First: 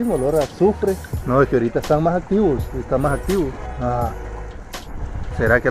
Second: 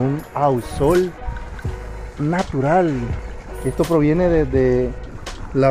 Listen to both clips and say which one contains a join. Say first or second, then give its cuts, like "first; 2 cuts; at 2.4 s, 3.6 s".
first; 2 cuts; at 1.1 s, 3.7 s